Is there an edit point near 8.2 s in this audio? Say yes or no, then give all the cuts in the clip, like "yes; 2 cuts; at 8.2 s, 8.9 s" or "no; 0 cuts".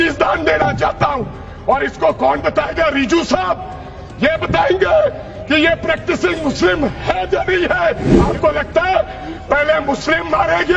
yes; 1 cut; at 8.2 s